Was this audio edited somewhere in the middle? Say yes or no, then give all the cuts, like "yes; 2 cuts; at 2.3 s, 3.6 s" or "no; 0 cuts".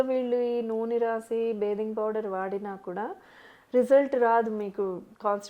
no; 0 cuts